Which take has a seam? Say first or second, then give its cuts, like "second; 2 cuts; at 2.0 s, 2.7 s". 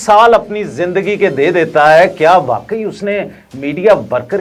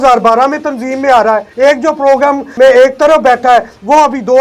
second; 2 cuts; at 1.5 s, 2.5 s